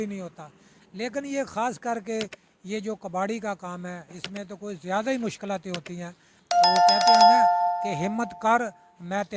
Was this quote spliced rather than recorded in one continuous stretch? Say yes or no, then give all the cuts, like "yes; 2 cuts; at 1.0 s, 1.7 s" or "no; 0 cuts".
yes; 2 cuts; at 6.3 s, 7.9 s